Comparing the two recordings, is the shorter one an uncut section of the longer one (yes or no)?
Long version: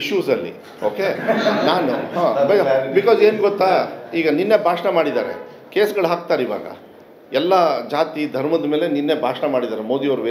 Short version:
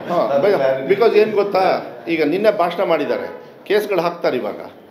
yes